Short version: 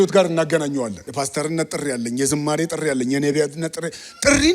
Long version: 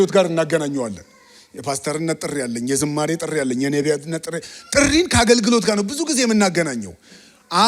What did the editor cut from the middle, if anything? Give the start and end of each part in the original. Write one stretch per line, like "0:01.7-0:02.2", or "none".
0:01.0-0:01.5